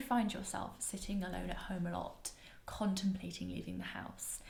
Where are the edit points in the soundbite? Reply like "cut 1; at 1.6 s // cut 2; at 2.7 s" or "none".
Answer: none